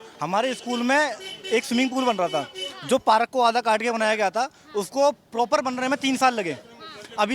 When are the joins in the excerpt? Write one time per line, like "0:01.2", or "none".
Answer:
none